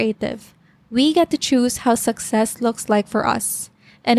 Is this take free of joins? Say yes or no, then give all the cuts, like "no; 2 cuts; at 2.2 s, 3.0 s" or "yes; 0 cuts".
yes; 0 cuts